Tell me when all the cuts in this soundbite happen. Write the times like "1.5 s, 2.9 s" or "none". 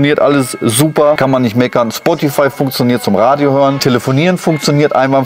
1.2 s, 3.8 s